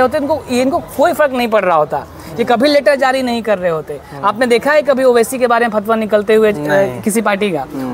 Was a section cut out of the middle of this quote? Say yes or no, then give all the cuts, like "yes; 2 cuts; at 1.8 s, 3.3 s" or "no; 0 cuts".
no; 0 cuts